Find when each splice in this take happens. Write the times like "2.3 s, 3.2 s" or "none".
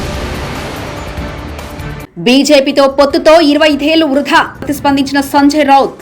2.0 s